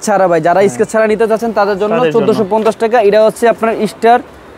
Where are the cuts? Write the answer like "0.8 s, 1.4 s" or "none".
none

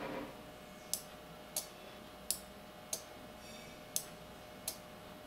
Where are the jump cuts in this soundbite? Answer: 2.0 s

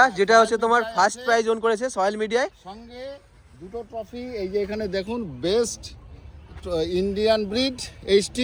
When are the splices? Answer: none

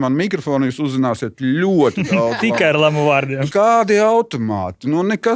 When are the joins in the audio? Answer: 3.5 s

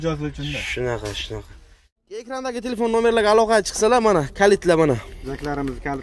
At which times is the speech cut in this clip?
2.3 s

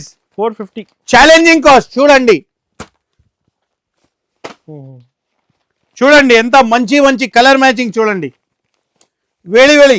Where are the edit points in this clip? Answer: none

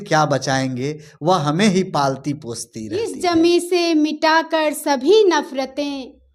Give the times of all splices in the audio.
3.1 s

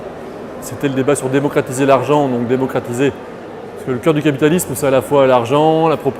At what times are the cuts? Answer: 4.8 s

